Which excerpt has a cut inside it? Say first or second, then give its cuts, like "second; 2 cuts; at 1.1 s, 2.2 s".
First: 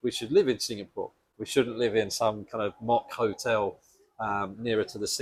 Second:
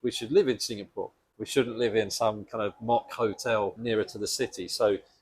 second; 1 cut; at 3.8 s